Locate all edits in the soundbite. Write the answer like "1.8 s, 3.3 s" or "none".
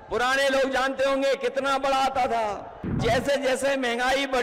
3.0 s